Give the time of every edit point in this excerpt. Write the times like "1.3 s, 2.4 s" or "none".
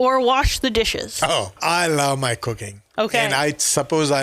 1.6 s